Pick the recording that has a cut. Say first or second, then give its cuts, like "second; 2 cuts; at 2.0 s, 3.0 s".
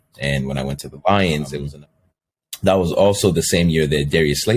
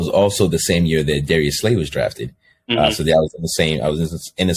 first; 1 cut; at 1.6 s